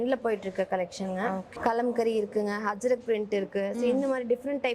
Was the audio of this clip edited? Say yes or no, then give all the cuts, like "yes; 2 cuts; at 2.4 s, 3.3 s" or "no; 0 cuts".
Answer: yes; 1 cut; at 1.5 s